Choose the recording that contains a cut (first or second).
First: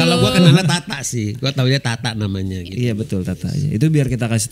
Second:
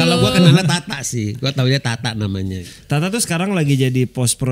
second